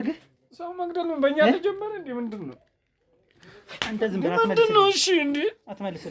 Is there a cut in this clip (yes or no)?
no